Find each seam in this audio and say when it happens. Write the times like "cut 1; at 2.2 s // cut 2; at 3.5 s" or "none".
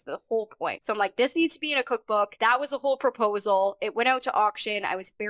cut 1; at 0.8 s // cut 2; at 2.3 s